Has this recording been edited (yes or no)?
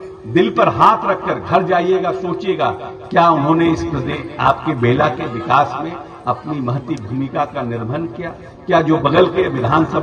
no